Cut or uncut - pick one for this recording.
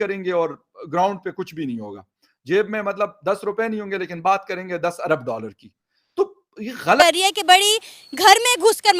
cut